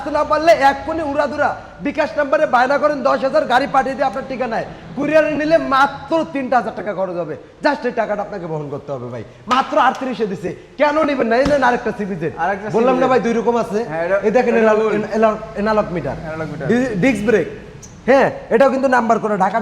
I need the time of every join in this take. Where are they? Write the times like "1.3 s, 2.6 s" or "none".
none